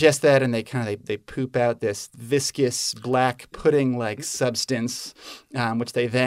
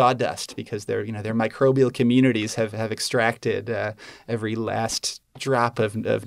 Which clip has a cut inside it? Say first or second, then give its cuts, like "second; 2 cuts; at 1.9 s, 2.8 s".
first; 1 cut; at 2.1 s